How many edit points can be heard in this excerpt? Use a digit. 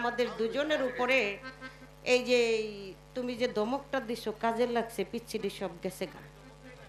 0